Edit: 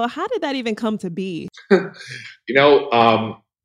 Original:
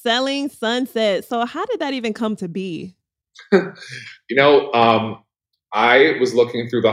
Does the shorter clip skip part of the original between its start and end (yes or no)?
yes